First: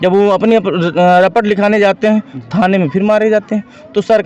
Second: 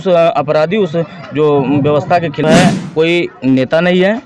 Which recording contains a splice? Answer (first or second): second